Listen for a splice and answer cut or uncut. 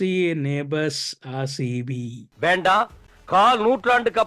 cut